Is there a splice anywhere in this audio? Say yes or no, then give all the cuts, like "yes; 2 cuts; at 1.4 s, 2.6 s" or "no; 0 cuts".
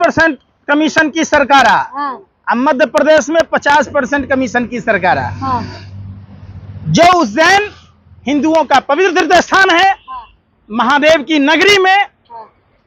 no; 0 cuts